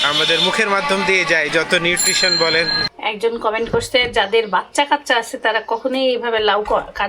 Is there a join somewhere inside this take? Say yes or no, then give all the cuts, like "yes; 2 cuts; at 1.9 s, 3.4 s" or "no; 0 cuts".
yes; 1 cut; at 2.9 s